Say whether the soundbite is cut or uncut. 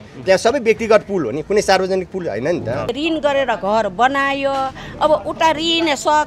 cut